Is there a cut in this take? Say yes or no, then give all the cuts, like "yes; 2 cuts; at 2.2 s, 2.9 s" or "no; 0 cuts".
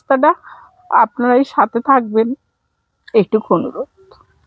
no; 0 cuts